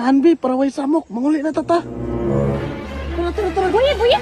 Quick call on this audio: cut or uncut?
uncut